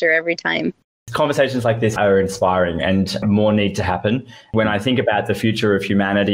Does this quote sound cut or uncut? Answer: cut